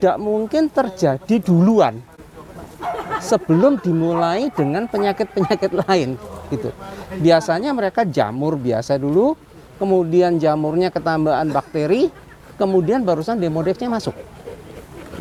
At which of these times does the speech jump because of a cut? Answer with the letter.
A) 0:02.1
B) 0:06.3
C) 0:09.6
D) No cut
D